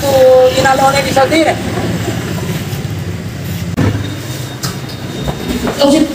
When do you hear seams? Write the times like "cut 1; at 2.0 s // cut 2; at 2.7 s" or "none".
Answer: cut 1; at 3.7 s